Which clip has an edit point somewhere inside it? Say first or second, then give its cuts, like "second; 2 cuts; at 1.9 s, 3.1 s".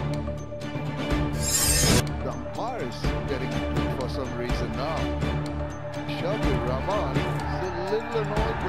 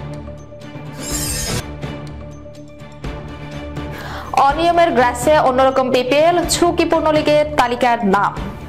first; 1 cut; at 1.1 s